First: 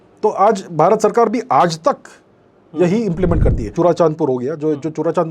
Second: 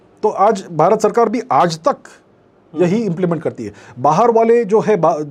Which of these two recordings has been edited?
first; 1 cut; at 3.7 s

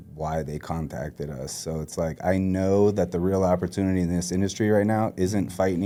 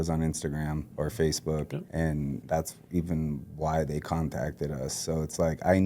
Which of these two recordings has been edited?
second; 2 cuts; at 0.9 s, 2.2 s

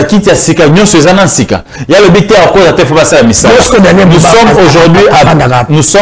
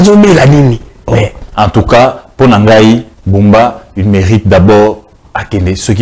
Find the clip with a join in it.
second; 1 cut; at 1.4 s

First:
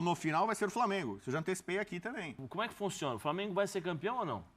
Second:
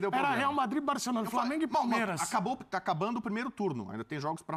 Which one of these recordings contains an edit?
first; 1 cut; at 2.4 s

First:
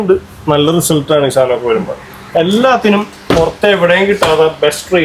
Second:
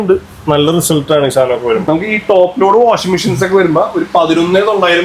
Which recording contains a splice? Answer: second; 1 cut; at 1.8 s

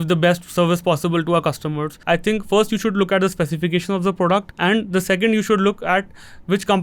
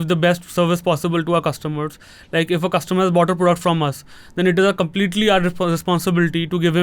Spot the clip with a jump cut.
first; 2 cuts; at 1.9 s, 4.5 s

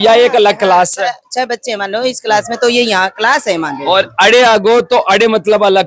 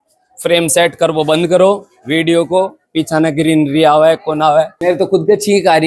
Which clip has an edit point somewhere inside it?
second; 1 cut; at 4.7 s

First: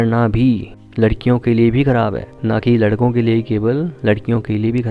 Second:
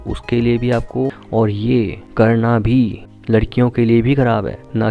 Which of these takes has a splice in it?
second; 1 cut; at 1.2 s

